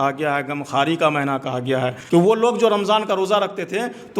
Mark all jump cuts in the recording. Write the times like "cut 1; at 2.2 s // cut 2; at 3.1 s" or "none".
cut 1; at 2.0 s